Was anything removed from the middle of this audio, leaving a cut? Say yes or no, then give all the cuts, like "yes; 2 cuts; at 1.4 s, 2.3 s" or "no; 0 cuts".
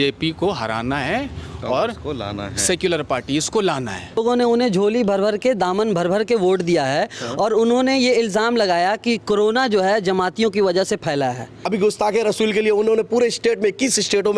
yes; 2 cuts; at 4.2 s, 11.5 s